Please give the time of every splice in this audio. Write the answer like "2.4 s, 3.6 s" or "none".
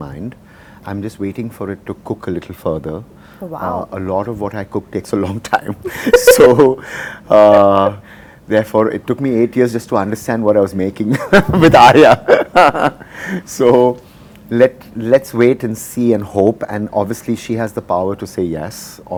none